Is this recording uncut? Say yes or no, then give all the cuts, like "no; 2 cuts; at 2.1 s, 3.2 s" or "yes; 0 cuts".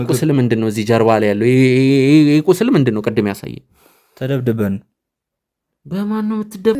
yes; 0 cuts